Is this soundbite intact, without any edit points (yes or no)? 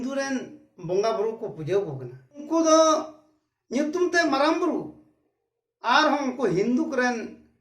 no